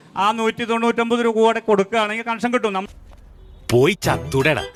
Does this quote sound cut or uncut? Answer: uncut